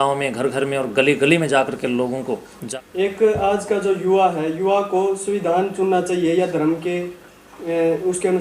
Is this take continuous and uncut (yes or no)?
no